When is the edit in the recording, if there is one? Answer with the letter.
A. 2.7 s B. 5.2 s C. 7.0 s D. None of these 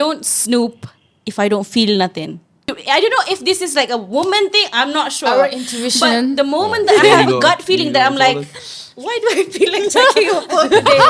A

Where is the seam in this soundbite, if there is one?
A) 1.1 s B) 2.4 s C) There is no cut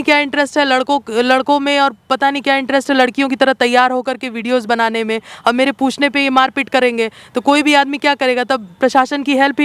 C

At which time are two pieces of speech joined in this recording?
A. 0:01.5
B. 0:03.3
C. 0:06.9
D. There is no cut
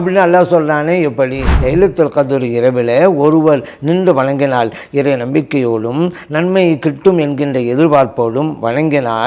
A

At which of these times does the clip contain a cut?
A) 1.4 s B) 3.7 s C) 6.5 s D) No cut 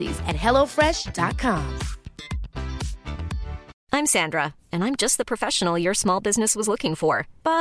B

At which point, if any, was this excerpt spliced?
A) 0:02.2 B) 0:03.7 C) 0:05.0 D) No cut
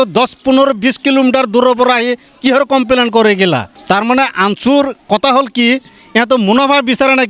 B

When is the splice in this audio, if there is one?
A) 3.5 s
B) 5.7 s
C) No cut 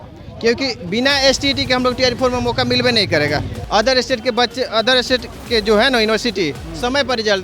A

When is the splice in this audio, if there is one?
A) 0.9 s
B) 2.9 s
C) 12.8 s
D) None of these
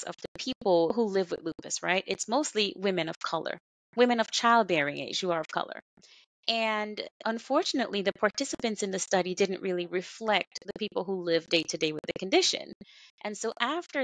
A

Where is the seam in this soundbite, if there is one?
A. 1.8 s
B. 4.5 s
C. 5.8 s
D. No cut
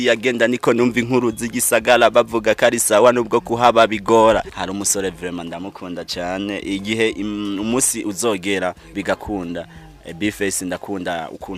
B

